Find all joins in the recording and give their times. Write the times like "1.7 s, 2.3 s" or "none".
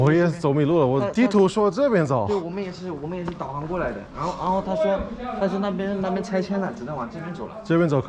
none